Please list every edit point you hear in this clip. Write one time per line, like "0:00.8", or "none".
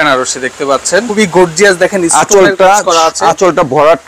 0:01.1